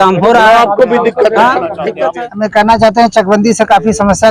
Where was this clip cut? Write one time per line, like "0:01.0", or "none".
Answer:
0:01.9